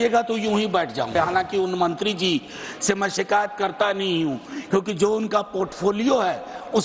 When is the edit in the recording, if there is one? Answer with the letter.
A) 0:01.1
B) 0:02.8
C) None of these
A